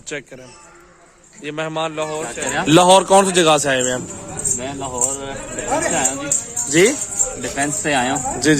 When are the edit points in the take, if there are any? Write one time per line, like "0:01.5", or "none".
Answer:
0:02.3